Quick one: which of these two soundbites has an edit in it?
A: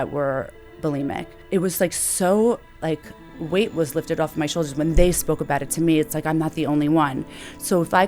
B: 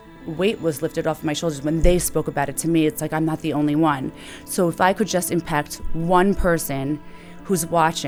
A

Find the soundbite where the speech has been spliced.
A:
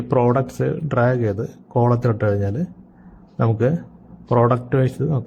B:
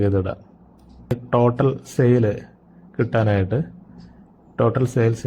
B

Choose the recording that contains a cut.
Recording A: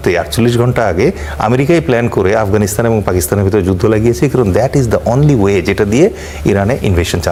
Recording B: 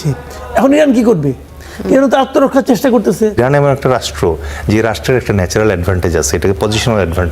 B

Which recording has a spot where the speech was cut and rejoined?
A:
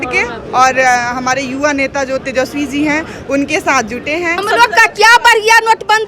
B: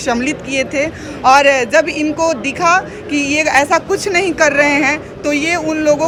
A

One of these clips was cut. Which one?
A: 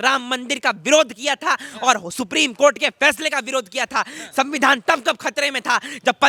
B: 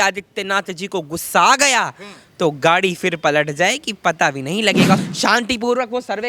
B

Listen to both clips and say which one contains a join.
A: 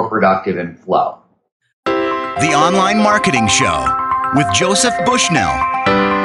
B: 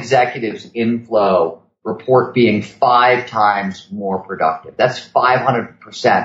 A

